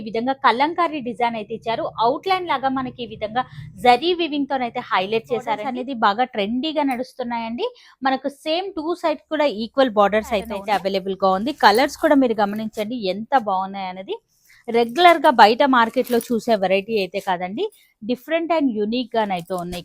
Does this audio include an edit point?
yes; 2 cuts; at 5.7 s, 10.5 s

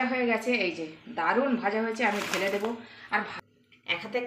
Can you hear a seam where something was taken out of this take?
yes; 1 cut; at 3.3 s

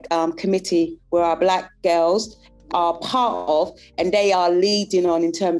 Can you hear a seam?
no; 0 cuts

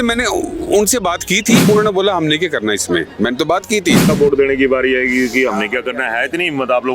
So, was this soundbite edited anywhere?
yes; 2 cuts; at 1.7 s, 4.1 s

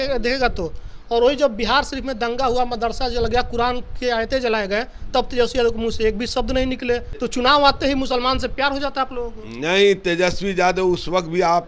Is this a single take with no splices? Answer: no; 1 cut; at 7.1 s

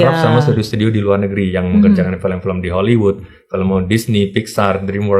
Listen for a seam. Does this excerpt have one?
no; 0 cuts

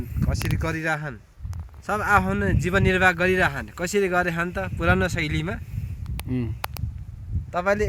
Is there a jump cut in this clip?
no; 0 cuts

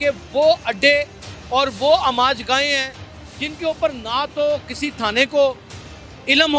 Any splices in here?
no; 0 cuts

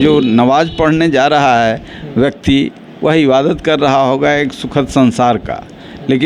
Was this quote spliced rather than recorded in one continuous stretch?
no; 0 cuts

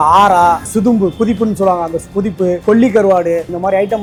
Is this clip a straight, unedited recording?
yes; 0 cuts

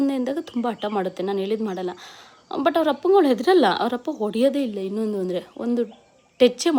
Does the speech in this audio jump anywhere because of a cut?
no; 0 cuts

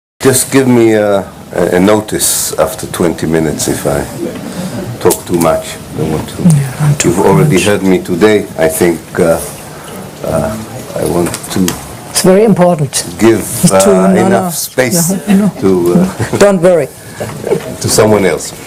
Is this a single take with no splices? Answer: yes; 0 cuts

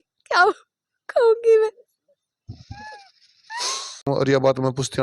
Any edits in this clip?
yes; 1 cut; at 4.0 s

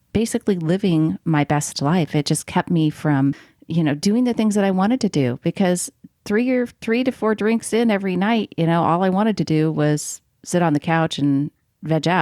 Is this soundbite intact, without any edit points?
no; 1 cut; at 3.5 s

